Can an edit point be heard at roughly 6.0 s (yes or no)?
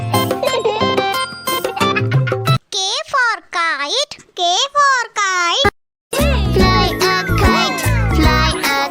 yes